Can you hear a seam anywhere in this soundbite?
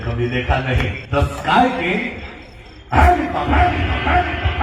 yes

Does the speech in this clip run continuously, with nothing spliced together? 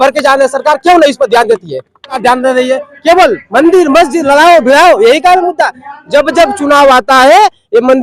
no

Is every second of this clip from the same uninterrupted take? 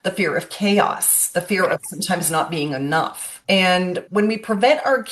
no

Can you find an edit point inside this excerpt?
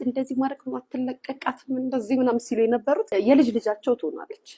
yes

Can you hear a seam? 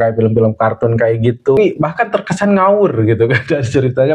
yes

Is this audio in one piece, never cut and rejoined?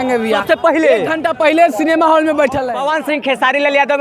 no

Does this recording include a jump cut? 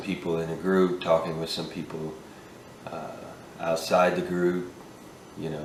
no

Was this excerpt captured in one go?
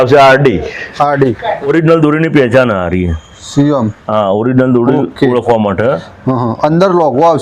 no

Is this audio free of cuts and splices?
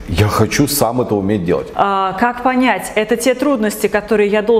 no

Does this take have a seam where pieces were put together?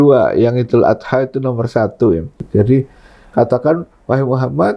yes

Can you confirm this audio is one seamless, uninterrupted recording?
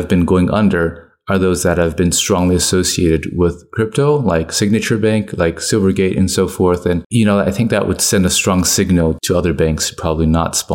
yes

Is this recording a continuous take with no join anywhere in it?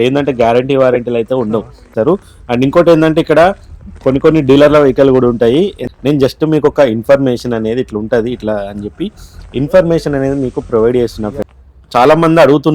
no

